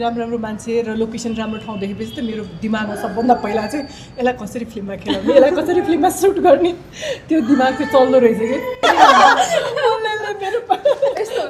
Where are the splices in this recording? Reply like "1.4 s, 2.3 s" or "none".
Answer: 8.8 s